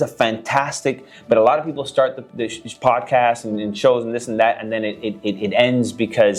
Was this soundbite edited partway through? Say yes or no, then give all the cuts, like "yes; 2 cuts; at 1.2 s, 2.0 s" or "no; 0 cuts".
no; 0 cuts